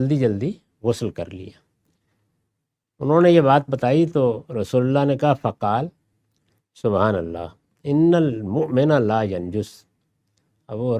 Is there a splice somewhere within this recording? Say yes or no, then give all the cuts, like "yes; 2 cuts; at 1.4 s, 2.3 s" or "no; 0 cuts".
no; 0 cuts